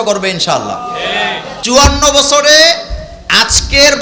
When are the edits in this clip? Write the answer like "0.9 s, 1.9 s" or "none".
1.5 s